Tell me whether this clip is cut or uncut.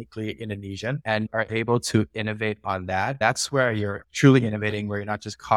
cut